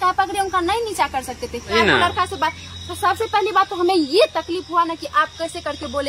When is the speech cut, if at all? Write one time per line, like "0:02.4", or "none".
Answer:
0:01.7